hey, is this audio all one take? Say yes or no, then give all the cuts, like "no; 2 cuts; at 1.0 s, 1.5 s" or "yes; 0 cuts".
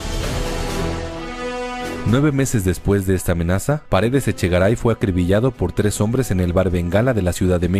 no; 1 cut; at 3.7 s